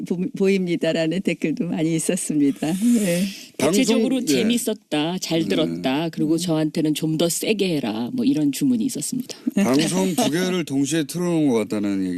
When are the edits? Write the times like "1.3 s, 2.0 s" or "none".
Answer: 9.9 s